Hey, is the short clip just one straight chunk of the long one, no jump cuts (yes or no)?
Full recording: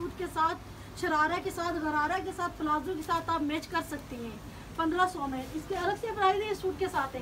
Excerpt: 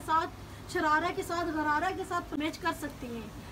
no